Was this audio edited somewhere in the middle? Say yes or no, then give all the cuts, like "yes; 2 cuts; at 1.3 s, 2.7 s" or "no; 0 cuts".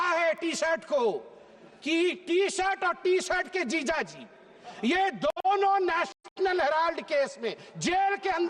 no; 0 cuts